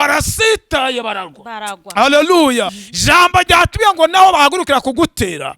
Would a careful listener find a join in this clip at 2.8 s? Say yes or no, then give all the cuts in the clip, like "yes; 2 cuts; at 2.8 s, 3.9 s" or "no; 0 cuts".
yes; 1 cut; at 2.8 s